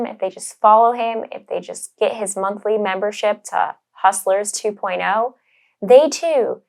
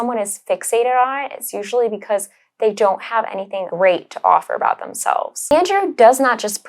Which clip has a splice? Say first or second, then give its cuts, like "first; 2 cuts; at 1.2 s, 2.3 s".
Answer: second; 2 cuts; at 3.7 s, 5.4 s